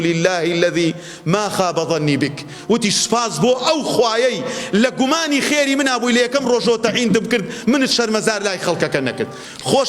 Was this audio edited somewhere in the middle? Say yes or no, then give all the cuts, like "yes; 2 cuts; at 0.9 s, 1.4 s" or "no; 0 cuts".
no; 0 cuts